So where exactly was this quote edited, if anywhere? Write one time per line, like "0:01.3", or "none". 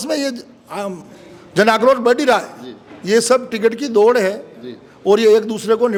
none